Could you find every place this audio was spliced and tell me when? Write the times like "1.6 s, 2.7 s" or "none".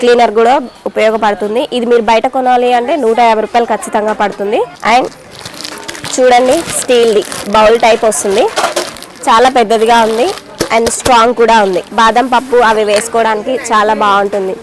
4.7 s, 11.9 s